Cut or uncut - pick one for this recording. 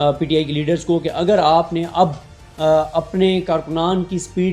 uncut